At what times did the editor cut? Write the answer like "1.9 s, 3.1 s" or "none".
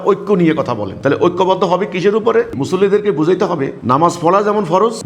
0.9 s, 2.5 s